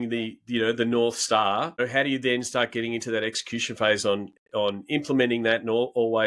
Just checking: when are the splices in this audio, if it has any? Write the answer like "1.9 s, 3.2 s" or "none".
none